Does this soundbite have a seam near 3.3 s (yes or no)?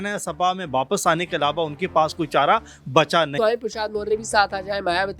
yes